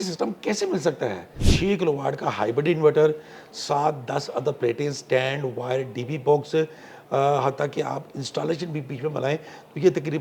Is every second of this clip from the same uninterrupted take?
no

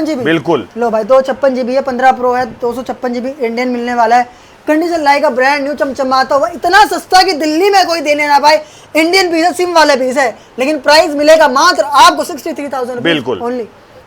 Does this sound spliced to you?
no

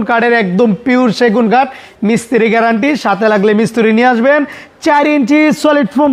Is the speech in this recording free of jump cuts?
yes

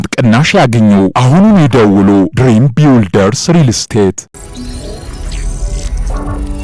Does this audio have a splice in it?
yes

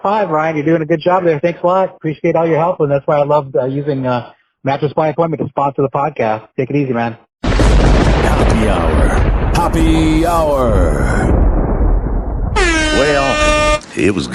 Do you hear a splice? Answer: no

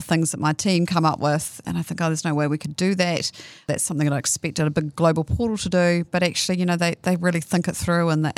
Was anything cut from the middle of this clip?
yes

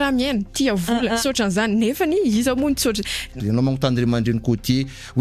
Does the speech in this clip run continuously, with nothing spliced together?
no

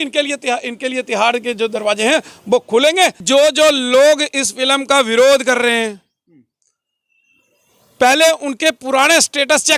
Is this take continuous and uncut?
no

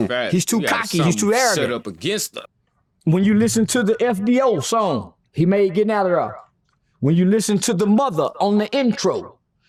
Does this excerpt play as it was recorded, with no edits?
yes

